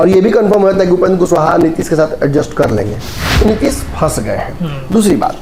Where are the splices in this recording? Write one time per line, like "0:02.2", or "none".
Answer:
0:03.2